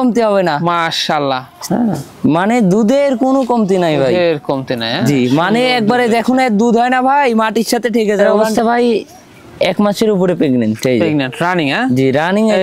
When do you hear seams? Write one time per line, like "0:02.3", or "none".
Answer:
0:01.5
0:08.4